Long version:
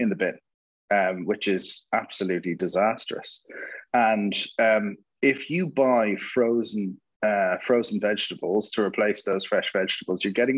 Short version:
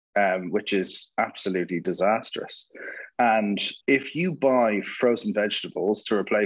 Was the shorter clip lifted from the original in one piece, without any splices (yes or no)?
no